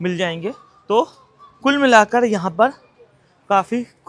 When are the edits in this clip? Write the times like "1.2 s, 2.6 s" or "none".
none